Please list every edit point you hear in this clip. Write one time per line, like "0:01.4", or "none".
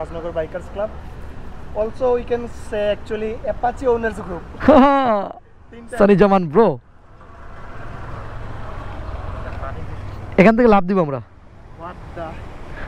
none

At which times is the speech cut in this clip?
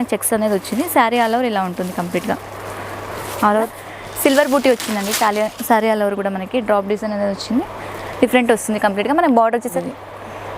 0:03.7
0:09.7

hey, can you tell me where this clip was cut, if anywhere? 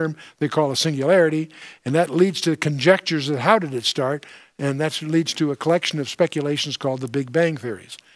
0:04.8

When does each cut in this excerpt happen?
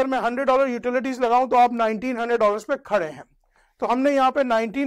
none

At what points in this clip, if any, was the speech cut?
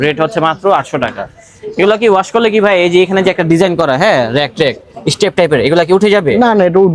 none

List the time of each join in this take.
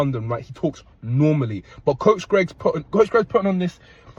0:01.6

